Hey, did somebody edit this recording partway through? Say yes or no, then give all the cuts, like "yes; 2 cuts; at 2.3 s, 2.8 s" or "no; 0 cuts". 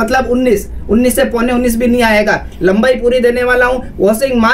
no; 0 cuts